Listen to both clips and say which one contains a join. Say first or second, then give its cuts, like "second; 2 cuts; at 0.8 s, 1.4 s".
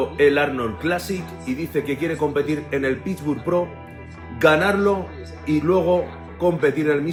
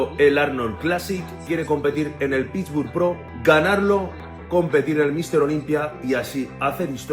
second; 3 cuts; at 1.4 s, 3.3 s, 4.3 s